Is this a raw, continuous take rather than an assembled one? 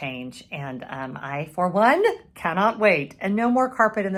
yes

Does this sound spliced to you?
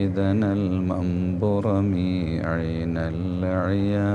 no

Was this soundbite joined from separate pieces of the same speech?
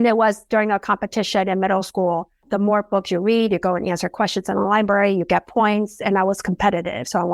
yes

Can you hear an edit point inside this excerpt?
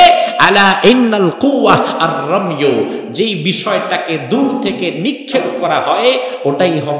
no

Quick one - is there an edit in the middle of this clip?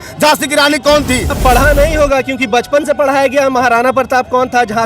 yes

